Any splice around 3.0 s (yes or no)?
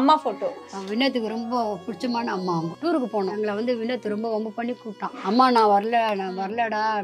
yes